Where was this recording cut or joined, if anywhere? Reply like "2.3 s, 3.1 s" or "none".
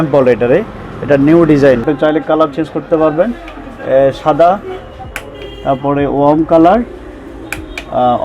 1.8 s

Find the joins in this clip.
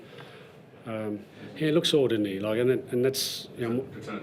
1.4 s

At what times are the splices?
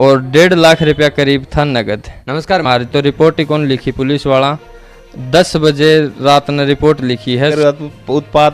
2.6 s, 7.5 s

